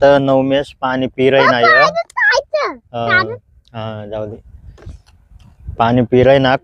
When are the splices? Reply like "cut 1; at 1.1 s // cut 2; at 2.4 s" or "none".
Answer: none